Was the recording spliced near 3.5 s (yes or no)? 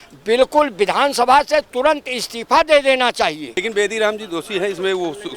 yes